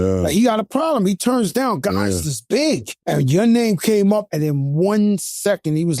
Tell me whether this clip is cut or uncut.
cut